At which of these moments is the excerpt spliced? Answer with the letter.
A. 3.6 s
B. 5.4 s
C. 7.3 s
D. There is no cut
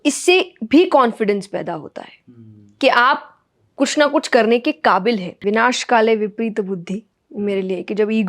B